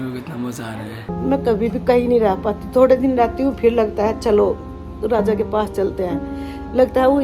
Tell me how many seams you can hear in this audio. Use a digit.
1